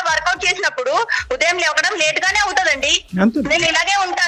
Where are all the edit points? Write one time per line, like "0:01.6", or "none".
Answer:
none